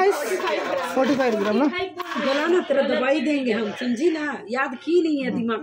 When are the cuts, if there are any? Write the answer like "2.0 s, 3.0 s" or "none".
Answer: none